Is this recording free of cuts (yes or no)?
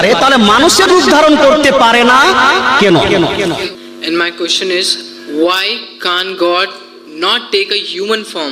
no